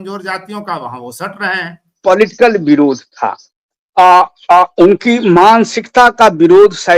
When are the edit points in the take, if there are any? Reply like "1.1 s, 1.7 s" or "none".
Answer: 1.9 s